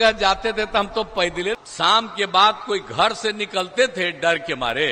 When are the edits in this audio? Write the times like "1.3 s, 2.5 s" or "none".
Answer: 1.6 s